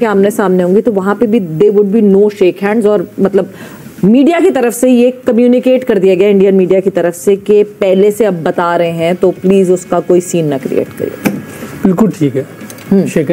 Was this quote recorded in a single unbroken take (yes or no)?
yes